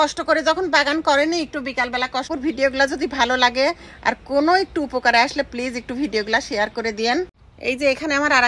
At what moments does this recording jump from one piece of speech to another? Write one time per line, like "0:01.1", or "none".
0:02.3
0:07.4

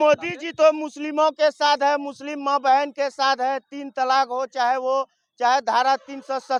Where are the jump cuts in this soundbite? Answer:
none

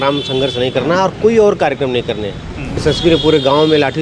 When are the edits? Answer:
0:02.8

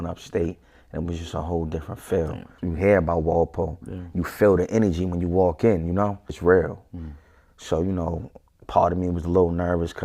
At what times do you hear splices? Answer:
0:02.5
0:06.4

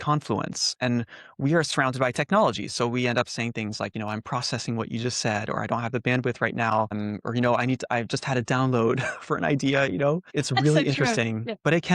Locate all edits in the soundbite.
0:06.9
0:10.3

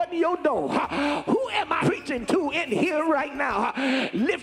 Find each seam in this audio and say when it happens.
0:01.8

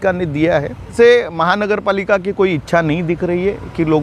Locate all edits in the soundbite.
0:00.9

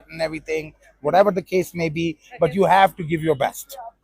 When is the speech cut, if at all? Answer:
none

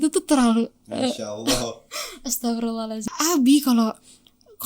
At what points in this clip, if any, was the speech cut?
0:02.9

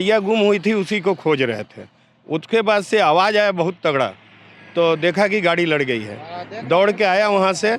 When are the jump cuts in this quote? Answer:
none

